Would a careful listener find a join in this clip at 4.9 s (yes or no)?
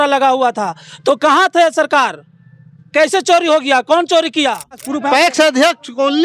yes